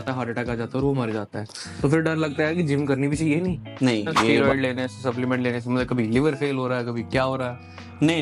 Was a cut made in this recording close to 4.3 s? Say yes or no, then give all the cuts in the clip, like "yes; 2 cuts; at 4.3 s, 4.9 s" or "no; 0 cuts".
yes; 1 cut; at 4.3 s